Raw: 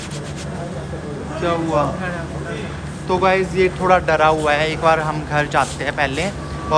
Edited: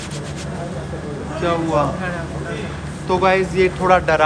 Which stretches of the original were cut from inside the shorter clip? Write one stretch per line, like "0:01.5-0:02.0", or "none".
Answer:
none

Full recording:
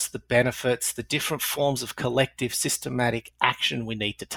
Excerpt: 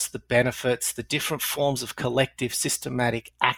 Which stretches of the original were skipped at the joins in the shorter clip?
none

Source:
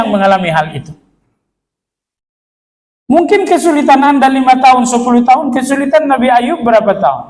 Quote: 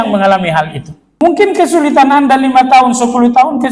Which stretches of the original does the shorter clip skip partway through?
0:01.2-0:03.1

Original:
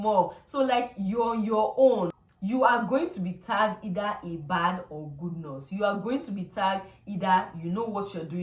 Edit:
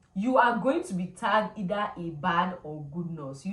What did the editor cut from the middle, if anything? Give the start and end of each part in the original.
none

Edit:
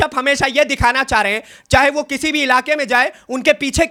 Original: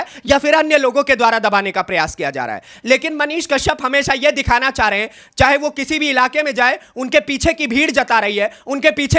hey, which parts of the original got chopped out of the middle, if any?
none

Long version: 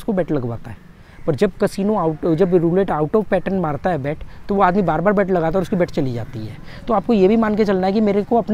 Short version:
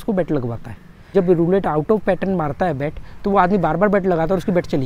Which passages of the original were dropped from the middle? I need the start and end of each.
0:01.1-0:02.4

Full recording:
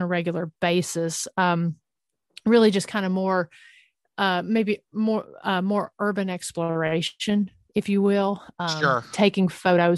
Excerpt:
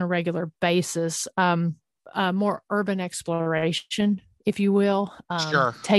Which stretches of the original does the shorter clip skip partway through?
0:02.0-0:05.3

